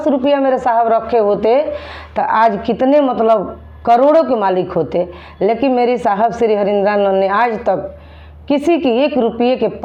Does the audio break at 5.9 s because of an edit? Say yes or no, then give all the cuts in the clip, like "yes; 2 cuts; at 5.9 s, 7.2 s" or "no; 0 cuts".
no; 0 cuts